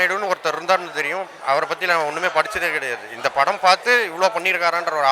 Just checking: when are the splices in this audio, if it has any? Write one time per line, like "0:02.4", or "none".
none